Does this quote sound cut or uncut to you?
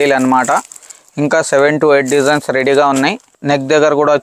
cut